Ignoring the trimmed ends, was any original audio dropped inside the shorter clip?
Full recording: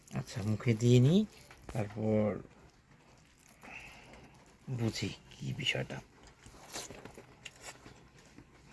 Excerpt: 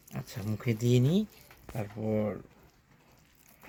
no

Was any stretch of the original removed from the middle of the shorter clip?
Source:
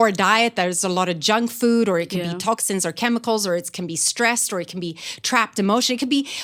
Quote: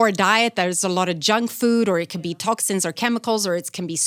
no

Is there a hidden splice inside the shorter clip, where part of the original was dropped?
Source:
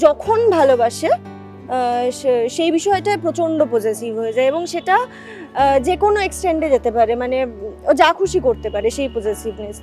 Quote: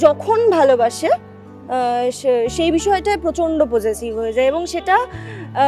no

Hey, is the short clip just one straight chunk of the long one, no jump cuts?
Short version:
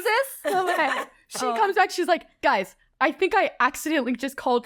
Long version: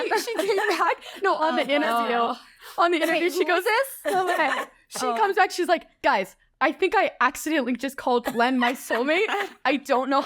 yes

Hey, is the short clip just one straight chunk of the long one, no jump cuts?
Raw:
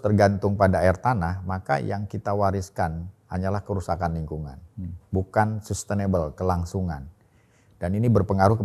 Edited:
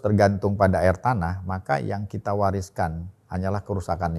yes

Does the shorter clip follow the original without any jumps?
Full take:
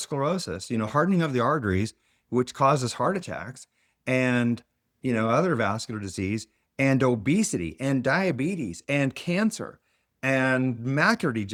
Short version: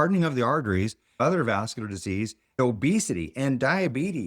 no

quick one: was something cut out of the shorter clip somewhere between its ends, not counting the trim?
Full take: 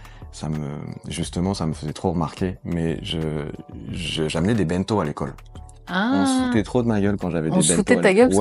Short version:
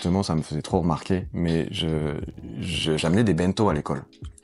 no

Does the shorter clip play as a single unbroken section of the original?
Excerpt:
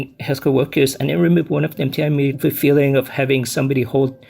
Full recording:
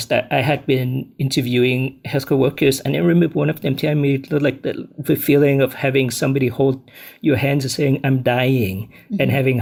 no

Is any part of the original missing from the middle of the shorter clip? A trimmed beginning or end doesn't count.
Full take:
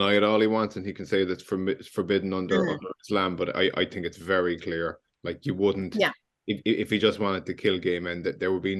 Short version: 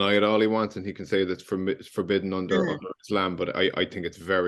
no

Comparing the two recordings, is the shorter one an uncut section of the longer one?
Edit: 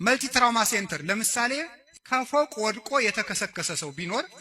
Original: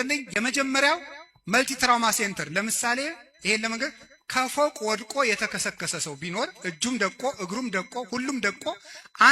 no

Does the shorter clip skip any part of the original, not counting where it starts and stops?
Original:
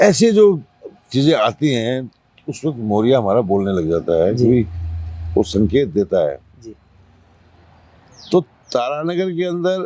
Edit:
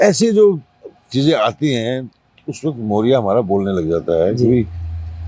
no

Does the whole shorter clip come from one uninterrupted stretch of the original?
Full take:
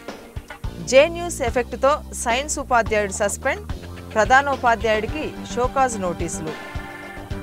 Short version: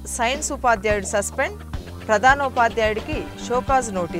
yes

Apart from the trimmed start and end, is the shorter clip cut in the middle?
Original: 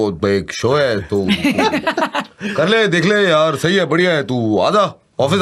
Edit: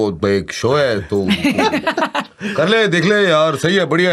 no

